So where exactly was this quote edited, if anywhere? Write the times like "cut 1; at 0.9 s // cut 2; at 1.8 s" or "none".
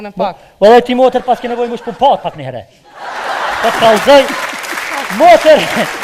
none